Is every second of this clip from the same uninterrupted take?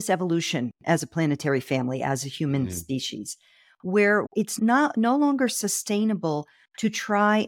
no; 1 cut; at 4.3 s

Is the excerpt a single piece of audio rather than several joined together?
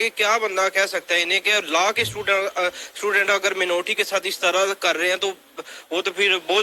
yes; 0 cuts

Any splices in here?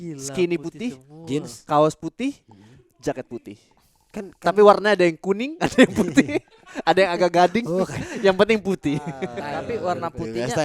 yes; 1 cut; at 9.3 s

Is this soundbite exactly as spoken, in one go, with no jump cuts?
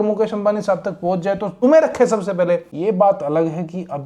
no; 2 cuts; at 1.5 s, 2.7 s

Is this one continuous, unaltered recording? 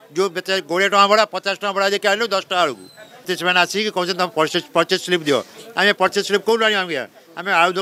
no; 1 cut; at 3.3 s

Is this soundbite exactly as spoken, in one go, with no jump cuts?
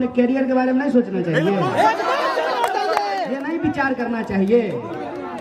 yes; 0 cuts

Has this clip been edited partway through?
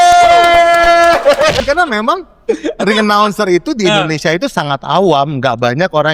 yes; 1 cut; at 1.6 s

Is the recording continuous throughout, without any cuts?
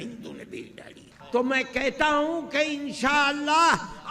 no; 1 cut; at 1.1 s

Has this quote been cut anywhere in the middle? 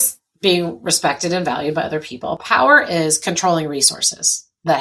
no; 0 cuts

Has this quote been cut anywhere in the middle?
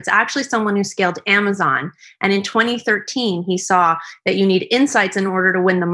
no; 0 cuts

